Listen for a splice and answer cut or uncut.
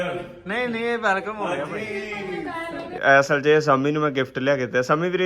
cut